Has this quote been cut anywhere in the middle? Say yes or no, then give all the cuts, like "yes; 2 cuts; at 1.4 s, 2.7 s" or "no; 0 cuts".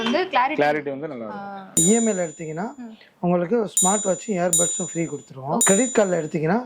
yes; 2 cuts; at 1.6 s, 5.6 s